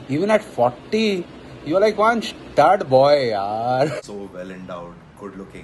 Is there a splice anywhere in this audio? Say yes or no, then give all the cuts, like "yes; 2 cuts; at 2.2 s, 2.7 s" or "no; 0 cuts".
yes; 1 cut; at 4.0 s